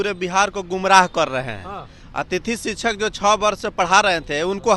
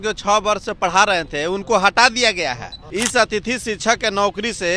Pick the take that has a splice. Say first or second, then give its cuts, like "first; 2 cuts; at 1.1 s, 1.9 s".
second; 1 cut; at 2.8 s